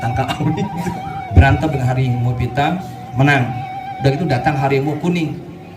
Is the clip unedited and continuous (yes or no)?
no